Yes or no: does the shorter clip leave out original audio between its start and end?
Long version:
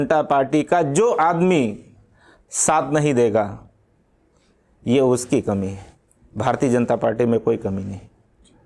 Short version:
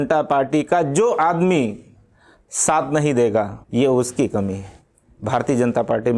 yes